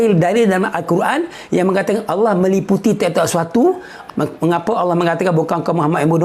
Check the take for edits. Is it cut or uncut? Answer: cut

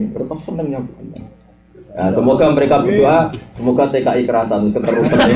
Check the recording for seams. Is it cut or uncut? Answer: uncut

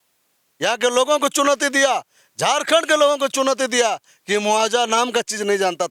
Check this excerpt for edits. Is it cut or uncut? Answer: uncut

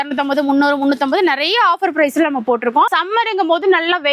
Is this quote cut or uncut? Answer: cut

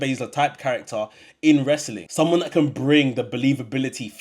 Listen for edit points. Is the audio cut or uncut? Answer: cut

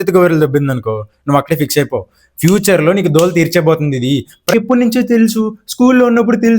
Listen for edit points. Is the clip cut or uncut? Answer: cut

